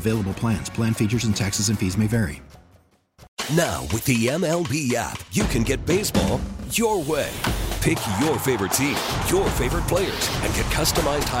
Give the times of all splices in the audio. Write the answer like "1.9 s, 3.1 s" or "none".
3.3 s